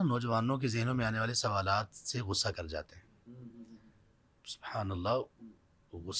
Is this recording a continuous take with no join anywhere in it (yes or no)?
yes